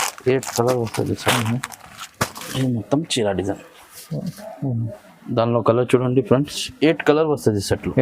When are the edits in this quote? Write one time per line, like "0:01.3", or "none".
0:02.4

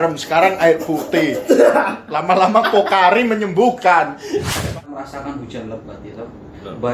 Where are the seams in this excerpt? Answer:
0:04.6

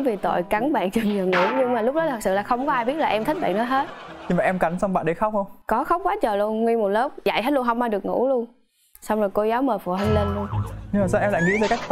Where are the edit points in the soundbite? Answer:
none

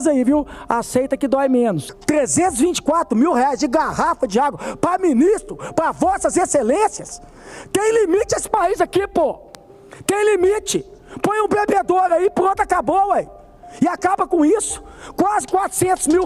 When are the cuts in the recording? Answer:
0:01.9

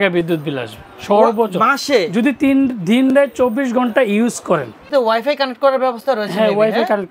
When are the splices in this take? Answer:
0:04.9

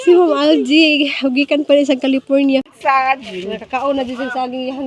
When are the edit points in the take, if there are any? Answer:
0:02.7

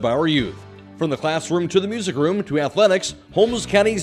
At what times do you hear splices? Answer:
none

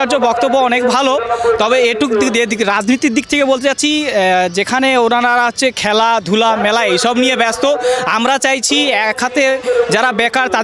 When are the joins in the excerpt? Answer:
none

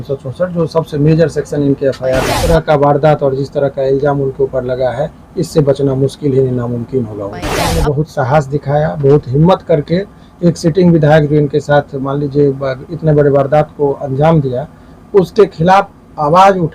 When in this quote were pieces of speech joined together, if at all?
0:02.3
0:07.7

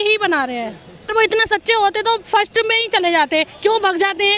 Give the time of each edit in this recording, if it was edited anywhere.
0:01.0

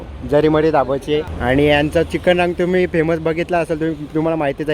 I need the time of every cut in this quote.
0:01.3

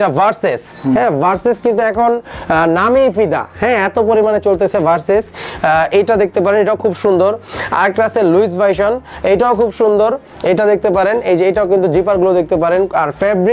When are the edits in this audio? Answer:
none

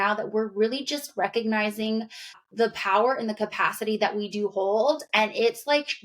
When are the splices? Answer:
0:02.3

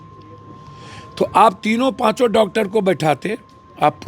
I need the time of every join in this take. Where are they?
none

